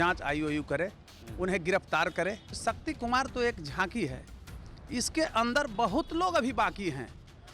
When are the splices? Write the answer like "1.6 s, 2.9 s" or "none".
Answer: 2.5 s